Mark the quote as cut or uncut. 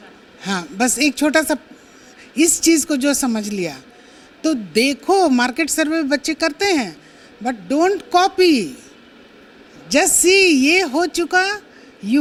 uncut